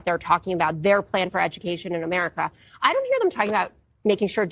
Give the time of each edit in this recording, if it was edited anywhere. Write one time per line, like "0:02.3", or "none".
none